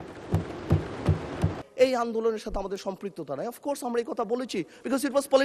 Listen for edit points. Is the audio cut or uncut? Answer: cut